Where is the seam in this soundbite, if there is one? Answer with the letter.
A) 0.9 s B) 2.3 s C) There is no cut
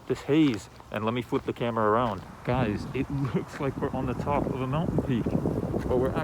B